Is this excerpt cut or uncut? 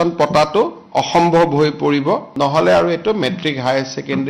cut